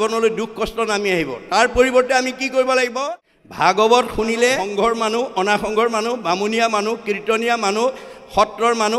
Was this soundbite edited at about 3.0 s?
yes; 2 cuts; at 3.0 s, 4.6 s

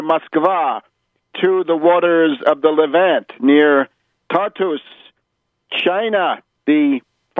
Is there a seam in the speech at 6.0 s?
no; 1 cut; at 1.9 s

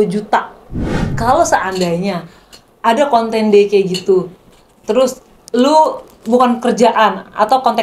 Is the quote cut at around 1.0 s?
yes; 1 cut; at 1.0 s

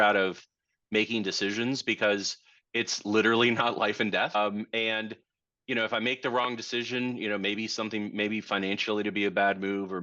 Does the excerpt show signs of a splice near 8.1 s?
no; 1 cut; at 4.4 s

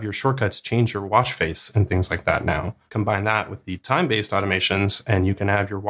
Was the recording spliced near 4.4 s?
no; 1 cut; at 2.8 s

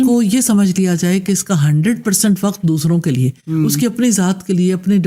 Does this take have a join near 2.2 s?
no; 0 cuts

